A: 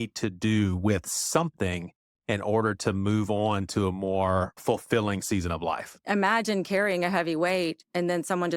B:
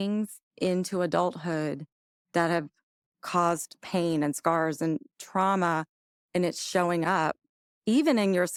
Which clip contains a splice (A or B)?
A